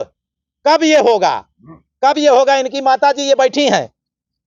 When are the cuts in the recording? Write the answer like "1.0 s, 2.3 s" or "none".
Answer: none

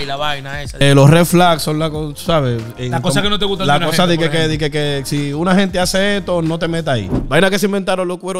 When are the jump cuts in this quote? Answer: 0.8 s, 7.2 s

